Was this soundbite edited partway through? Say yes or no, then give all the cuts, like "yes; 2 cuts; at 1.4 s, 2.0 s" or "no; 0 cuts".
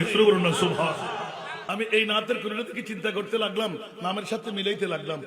yes; 1 cut; at 1.5 s